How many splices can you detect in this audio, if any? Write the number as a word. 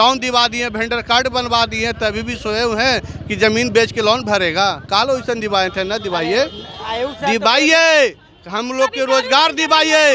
zero